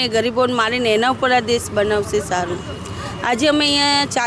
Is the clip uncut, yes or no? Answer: yes